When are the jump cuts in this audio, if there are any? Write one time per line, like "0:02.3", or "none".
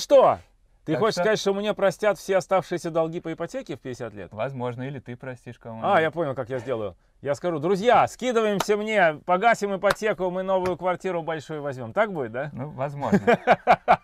none